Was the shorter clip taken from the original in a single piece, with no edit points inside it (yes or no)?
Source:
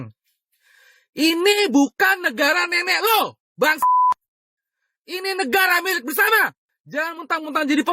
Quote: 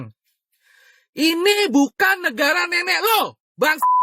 yes